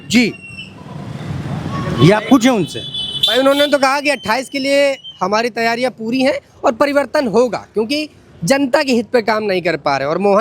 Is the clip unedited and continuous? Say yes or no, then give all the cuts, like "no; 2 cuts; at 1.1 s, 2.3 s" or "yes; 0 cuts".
yes; 0 cuts